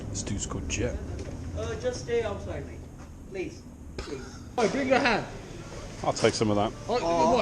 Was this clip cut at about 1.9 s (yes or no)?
no